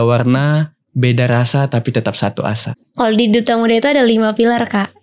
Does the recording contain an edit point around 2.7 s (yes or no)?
yes